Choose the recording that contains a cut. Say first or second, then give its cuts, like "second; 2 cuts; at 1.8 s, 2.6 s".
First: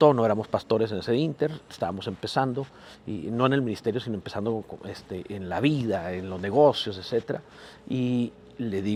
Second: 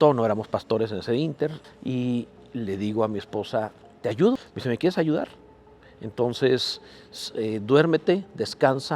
second; 2 cuts; at 1.6 s, 4.4 s